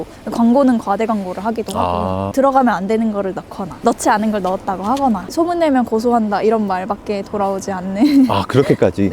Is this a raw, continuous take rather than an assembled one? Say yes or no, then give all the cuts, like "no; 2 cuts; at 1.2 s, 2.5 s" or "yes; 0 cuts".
no; 2 cuts; at 2.3 s, 5.2 s